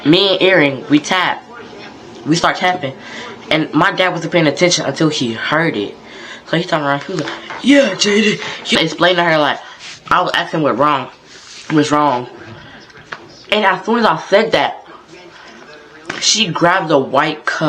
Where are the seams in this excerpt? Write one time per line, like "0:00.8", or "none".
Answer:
0:08.7